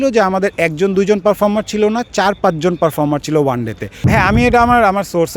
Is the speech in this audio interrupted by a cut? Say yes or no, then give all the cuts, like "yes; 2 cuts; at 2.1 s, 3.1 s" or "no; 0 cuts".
yes; 1 cut; at 4.0 s